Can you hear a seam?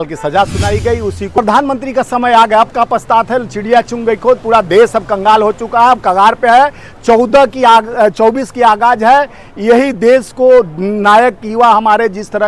yes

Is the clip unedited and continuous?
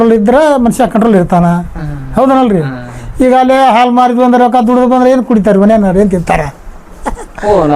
yes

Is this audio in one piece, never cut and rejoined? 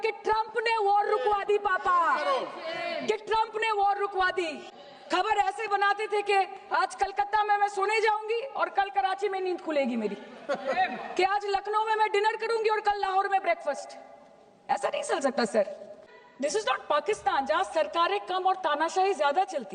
no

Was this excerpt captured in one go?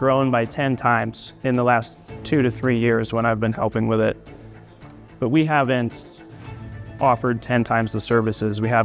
yes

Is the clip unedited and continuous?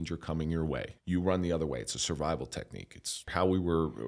no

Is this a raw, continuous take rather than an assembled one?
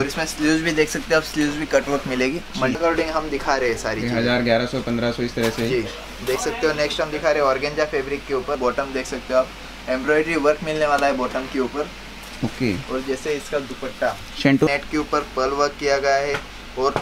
no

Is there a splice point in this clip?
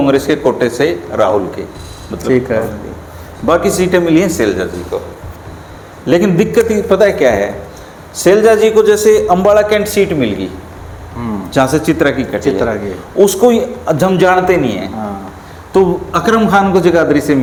no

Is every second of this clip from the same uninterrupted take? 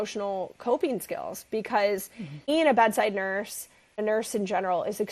no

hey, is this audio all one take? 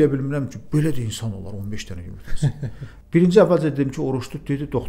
no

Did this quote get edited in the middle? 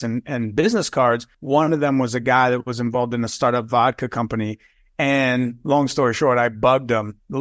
yes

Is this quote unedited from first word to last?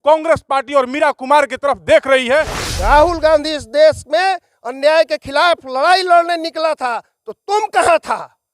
no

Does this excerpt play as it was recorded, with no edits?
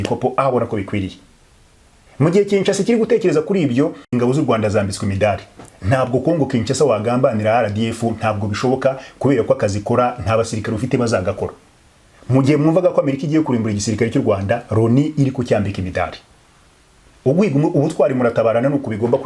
no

